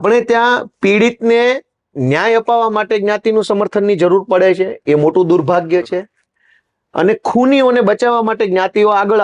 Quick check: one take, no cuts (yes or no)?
yes